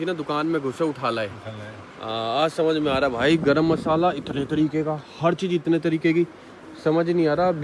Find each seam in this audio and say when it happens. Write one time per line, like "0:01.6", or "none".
none